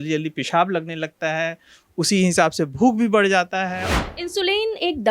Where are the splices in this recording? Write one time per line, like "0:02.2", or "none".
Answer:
0:03.8